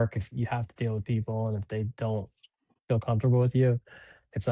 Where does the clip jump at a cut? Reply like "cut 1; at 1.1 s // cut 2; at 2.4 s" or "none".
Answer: none